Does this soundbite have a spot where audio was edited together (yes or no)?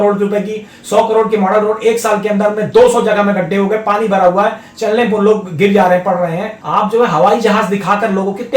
yes